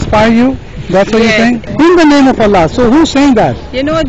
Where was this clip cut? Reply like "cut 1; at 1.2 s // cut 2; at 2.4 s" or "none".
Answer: cut 1; at 1.7 s